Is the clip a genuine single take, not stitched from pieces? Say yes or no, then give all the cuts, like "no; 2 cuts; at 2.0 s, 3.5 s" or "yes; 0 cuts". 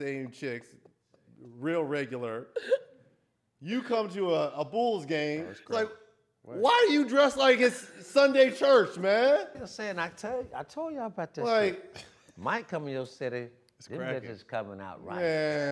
yes; 0 cuts